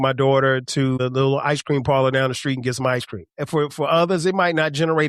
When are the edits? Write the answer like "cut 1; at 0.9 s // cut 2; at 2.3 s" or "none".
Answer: cut 1; at 1.0 s // cut 2; at 3.4 s